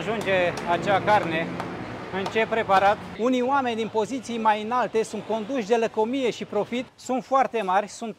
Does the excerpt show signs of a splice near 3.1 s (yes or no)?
yes